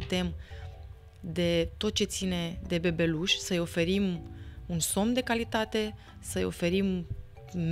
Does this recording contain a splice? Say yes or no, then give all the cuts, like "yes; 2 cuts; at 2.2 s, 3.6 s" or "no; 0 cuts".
no; 0 cuts